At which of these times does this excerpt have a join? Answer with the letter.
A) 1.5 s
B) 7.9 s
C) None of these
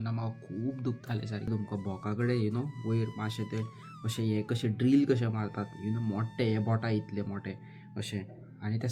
A